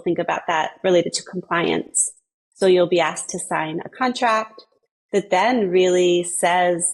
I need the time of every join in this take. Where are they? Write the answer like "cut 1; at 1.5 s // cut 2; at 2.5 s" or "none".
none